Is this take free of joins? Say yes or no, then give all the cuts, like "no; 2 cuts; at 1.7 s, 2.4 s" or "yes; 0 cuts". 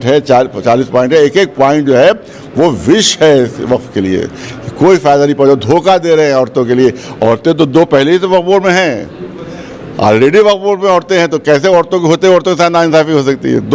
yes; 0 cuts